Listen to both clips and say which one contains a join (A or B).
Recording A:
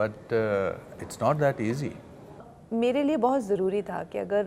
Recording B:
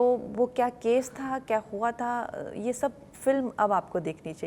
A